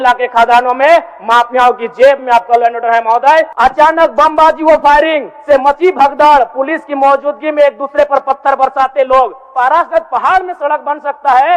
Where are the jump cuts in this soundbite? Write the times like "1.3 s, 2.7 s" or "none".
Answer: 3.5 s, 9.4 s